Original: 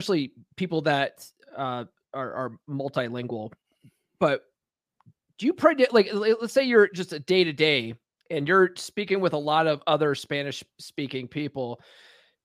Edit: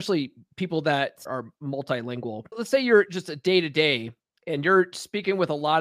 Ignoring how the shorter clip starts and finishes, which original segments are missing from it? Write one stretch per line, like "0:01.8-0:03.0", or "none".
0:01.2-0:02.3
0:03.7-0:06.4